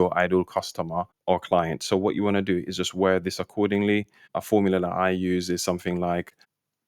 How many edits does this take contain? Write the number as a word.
one